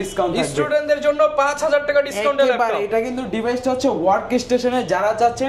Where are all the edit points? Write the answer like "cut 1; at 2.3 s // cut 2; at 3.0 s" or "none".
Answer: none